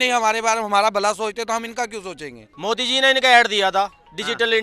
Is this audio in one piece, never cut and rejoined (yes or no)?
no